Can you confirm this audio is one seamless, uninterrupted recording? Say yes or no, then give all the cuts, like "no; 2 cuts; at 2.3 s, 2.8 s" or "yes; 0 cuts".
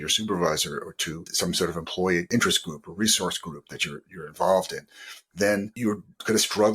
no; 3 cuts; at 1.3 s, 2.3 s, 5.7 s